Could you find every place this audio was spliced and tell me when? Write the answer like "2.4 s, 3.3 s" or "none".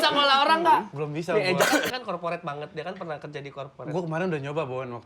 1.0 s, 1.9 s